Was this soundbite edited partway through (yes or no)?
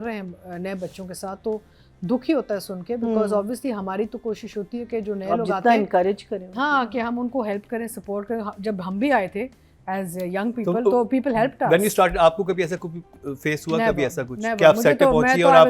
no